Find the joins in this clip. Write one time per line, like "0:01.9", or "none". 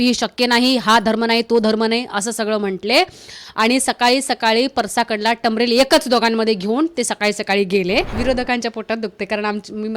0:08.2